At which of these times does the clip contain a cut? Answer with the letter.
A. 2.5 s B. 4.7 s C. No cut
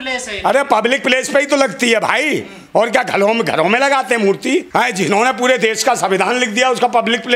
B